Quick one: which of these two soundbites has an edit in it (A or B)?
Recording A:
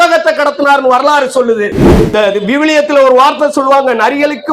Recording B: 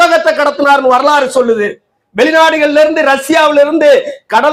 A